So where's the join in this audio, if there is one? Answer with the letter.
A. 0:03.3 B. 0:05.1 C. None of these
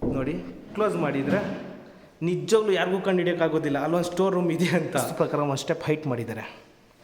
B